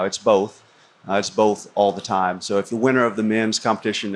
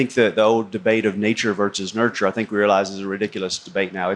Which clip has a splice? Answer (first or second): first